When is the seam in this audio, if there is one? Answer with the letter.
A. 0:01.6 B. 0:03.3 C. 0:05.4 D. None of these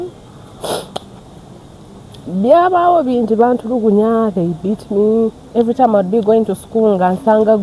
C